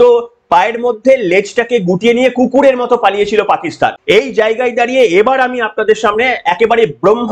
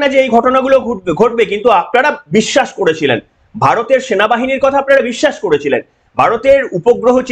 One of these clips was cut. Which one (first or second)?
first